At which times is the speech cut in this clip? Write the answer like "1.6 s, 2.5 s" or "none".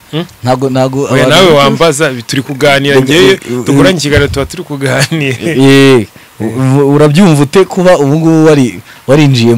none